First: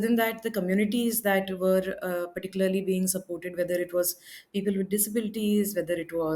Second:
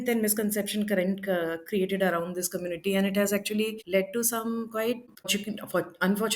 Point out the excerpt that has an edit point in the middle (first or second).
second